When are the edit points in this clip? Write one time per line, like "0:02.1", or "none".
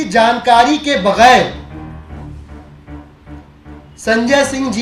0:01.6
0:03.8